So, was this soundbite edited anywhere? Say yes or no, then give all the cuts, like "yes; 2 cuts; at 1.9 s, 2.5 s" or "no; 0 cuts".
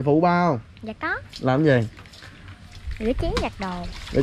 no; 0 cuts